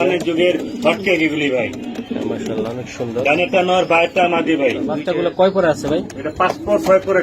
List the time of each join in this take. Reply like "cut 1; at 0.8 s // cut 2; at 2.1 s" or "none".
cut 1; at 5.2 s